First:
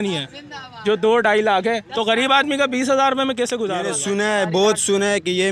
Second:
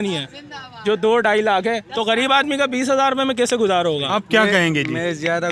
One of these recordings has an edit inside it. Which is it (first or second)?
first